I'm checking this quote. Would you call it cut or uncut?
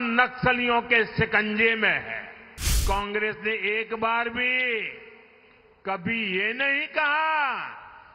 cut